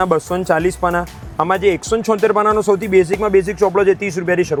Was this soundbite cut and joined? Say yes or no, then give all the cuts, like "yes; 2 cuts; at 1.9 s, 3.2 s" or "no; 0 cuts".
no; 0 cuts